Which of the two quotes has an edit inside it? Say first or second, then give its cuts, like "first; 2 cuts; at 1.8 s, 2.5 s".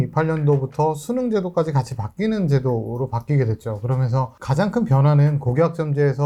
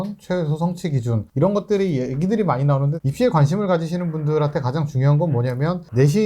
second; 1 cut; at 3.0 s